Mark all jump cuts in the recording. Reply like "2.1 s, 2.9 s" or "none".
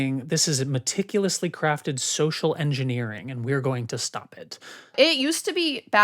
4.9 s